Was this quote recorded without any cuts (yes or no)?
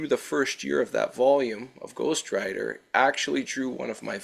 yes